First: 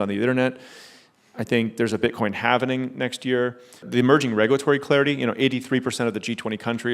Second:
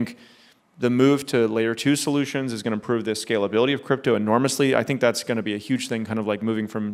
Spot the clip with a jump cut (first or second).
first